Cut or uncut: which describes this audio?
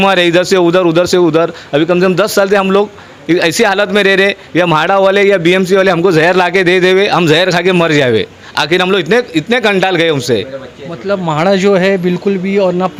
uncut